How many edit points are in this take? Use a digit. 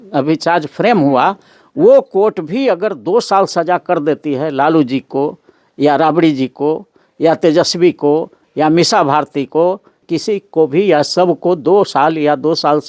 1